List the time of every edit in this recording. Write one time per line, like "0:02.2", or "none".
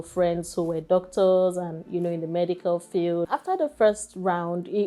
0:03.3